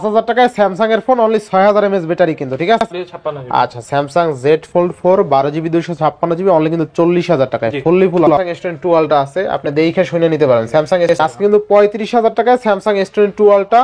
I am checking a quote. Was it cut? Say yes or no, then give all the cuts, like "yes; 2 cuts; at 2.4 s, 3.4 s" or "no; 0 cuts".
yes; 3 cuts; at 3.0 s, 8.3 s, 11.1 s